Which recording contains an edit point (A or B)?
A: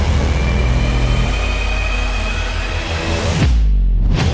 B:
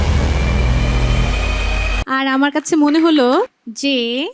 B